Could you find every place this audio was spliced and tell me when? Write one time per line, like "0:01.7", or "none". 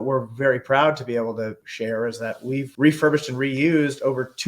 0:01.6
0:02.7